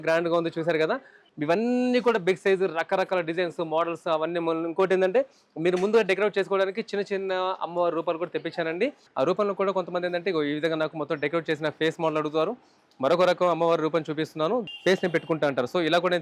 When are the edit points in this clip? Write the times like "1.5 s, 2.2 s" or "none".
1.2 s, 9.0 s, 14.7 s